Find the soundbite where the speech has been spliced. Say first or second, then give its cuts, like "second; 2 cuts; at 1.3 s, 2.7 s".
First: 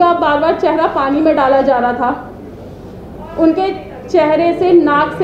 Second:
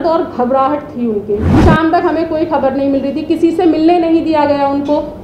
second; 1 cut; at 1.5 s